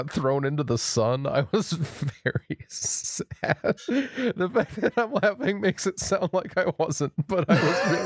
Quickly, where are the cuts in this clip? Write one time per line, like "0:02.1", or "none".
none